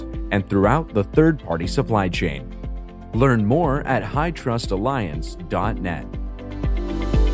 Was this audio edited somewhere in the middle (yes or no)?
yes